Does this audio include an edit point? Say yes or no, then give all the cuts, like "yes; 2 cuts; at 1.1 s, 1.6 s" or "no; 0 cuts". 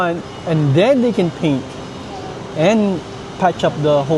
no; 0 cuts